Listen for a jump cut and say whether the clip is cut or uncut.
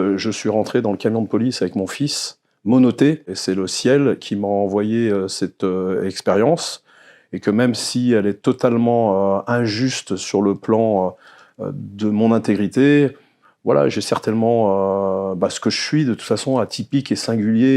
cut